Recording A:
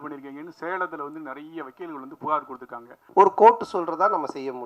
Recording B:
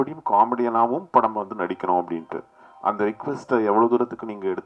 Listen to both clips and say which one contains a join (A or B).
A